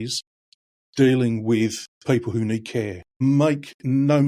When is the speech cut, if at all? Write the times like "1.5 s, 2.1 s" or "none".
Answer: 1.9 s, 3.1 s